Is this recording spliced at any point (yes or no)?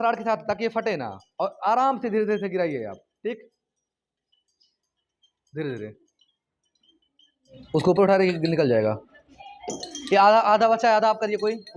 yes